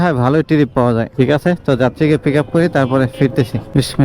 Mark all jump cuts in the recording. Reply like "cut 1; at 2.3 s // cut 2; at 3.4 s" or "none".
none